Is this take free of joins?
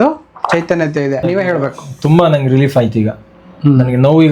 no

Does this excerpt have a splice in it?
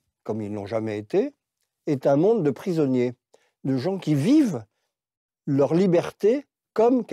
no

